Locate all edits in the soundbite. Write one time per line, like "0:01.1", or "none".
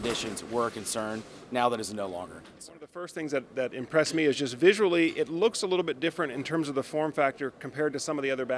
0:03.1